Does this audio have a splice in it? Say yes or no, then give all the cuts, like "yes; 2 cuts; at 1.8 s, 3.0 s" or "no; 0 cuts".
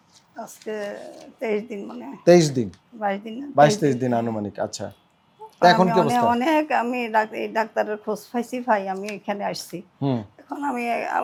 no; 0 cuts